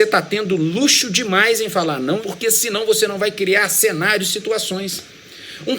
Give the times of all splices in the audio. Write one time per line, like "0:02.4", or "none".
0:02.2